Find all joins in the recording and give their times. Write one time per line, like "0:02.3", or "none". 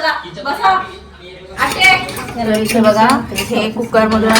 0:02.2